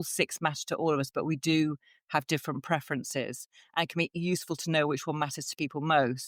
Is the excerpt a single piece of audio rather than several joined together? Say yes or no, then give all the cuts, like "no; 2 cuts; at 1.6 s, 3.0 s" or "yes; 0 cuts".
yes; 0 cuts